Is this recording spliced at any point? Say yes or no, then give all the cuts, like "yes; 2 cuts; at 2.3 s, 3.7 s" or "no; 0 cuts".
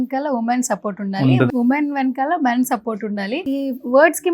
yes; 2 cuts; at 1.5 s, 3.4 s